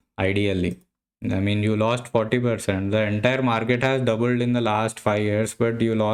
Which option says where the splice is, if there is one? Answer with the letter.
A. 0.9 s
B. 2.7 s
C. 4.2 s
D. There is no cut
D